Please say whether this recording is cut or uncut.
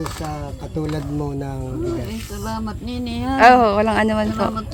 uncut